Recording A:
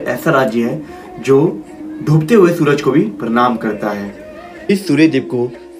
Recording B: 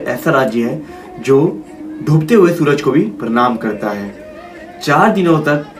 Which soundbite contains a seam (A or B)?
A